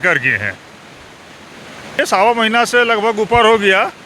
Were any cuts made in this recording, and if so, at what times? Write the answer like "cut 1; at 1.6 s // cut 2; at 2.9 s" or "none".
cut 1; at 2.0 s